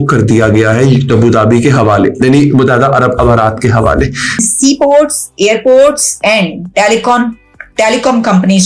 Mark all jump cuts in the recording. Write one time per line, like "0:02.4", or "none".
0:04.5